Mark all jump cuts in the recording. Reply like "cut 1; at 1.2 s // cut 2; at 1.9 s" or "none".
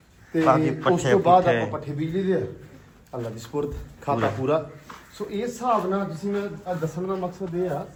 none